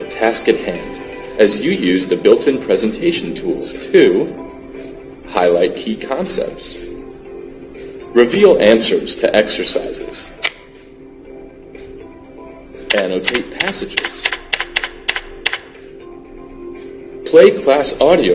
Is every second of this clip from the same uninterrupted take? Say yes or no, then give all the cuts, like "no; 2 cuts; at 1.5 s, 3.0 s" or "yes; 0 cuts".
no; 1 cut; at 10.7 s